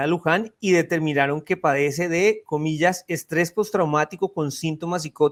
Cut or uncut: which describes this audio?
uncut